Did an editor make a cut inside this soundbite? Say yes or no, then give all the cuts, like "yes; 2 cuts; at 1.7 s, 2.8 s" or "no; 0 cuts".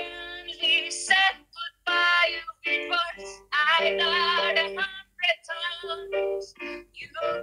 no; 0 cuts